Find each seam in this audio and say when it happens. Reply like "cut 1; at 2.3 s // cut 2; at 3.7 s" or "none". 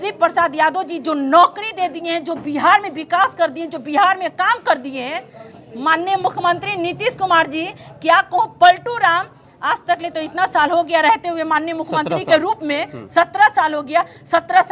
none